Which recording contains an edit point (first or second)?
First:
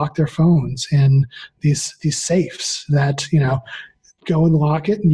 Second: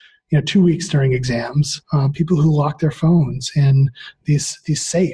second